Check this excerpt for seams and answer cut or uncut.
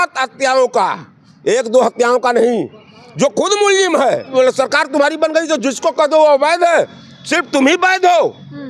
cut